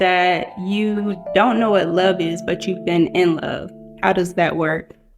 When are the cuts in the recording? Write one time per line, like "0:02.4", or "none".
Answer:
0:03.8